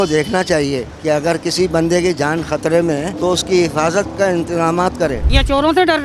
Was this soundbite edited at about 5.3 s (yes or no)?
yes